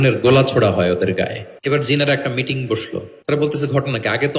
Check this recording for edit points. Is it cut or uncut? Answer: cut